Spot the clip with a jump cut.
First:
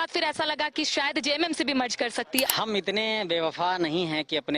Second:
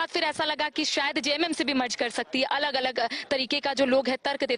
first; 1 cut; at 2.5 s

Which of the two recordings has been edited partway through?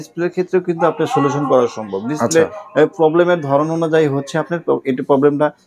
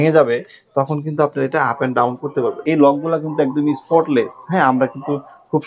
second; 1 cut; at 2.6 s

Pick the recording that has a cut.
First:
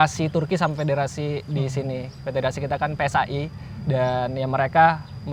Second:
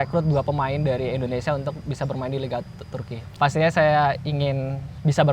second; 1 cut; at 3.3 s

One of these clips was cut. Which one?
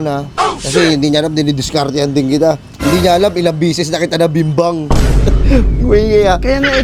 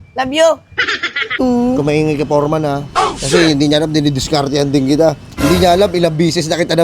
second; 1 cut; at 1.4 s

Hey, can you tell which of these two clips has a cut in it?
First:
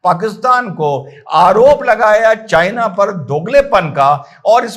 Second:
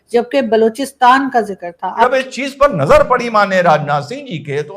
second; 1 cut; at 2.0 s

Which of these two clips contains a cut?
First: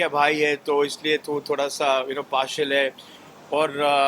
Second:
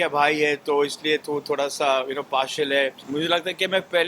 second; 1 cut; at 3.0 s

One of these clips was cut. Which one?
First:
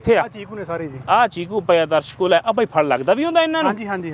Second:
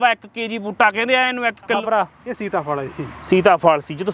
second; 1 cut; at 1.8 s

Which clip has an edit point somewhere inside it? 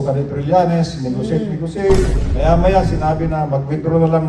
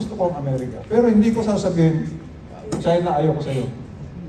first; 1 cut; at 2.2 s

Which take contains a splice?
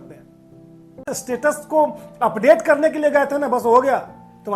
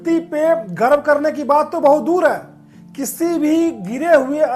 first; 1 cut; at 1.1 s

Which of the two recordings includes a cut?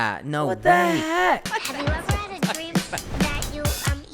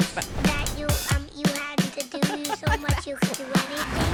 first; 1 cut; at 1.4 s

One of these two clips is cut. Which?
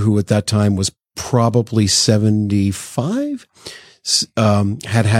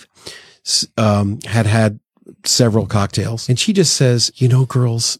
second; 2 cuts; at 3.4 s, 4.3 s

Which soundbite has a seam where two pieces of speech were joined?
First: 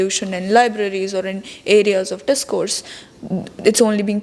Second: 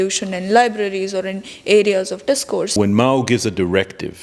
second; 1 cut; at 2.8 s

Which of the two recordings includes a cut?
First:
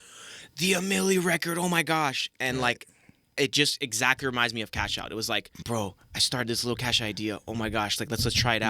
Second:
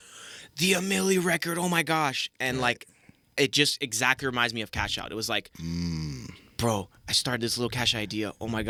first; 1 cut; at 5.5 s

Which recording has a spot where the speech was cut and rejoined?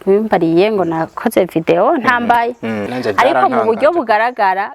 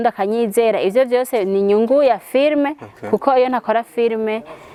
first; 1 cut; at 2.8 s

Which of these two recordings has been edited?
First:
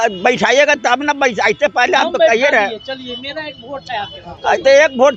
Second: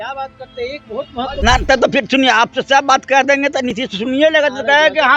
second; 1 cut; at 1.4 s

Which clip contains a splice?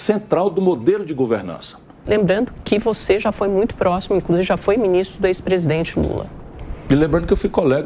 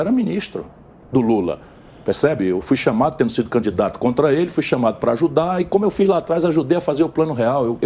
first; 1 cut; at 1.9 s

